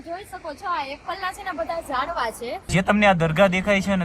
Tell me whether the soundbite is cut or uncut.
cut